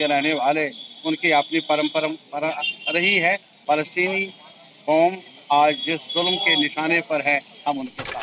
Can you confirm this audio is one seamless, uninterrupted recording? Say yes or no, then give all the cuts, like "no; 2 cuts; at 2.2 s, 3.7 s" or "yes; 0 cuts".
no; 1 cut; at 3.5 s